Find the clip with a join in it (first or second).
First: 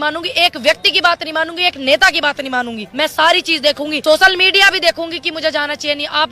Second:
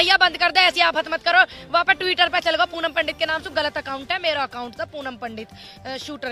first